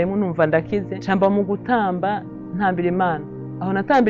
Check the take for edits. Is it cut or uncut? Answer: cut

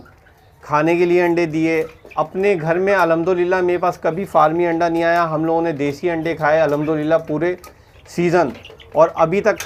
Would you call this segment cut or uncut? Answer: uncut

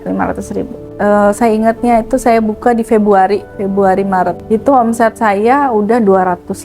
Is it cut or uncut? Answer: cut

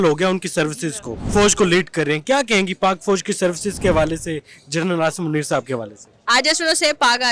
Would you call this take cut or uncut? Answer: cut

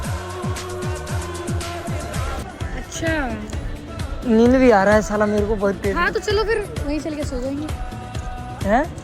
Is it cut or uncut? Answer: cut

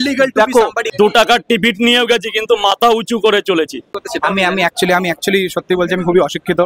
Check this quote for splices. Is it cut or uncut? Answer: cut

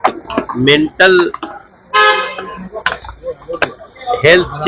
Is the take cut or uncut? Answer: uncut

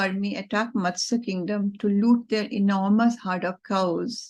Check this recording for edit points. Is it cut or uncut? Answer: uncut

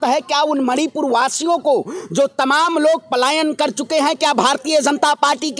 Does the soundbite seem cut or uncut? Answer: uncut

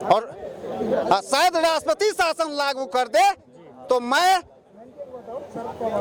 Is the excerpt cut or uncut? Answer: uncut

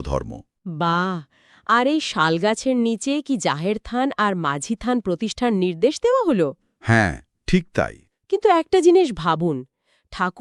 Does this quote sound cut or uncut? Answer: uncut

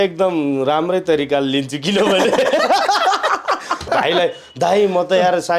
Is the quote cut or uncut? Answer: cut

